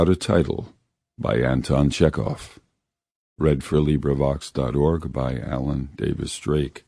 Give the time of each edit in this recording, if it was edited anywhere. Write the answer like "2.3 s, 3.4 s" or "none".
4.7 s